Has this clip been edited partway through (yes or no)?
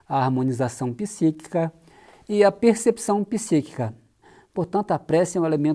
yes